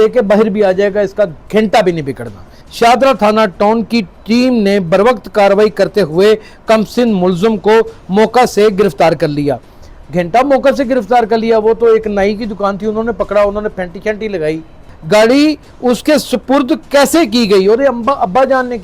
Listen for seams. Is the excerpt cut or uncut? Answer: cut